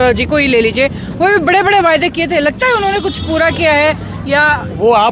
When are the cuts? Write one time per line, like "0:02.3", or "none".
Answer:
none